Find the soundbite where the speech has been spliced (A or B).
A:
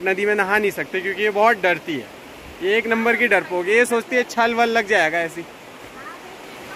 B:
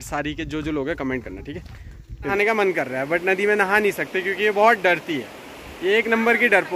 B